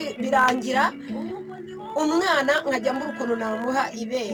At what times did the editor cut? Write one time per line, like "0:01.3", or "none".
none